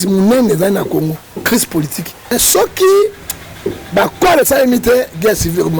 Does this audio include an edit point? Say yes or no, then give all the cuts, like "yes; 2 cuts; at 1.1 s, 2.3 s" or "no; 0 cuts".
yes; 1 cut; at 2.3 s